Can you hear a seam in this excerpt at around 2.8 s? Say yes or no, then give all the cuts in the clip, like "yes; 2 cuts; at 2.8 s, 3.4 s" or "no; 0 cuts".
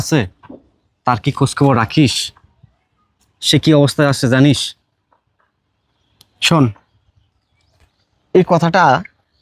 no; 0 cuts